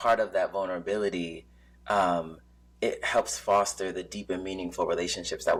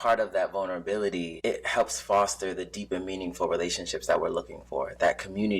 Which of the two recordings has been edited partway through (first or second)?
second